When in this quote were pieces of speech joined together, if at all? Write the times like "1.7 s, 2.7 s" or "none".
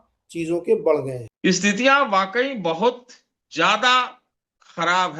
1.2 s